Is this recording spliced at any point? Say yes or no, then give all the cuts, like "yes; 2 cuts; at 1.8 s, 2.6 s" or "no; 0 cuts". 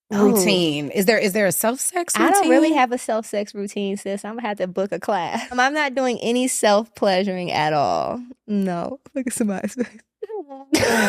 yes; 1 cut; at 5.6 s